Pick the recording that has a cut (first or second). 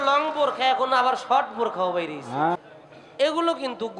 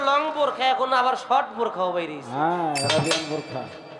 first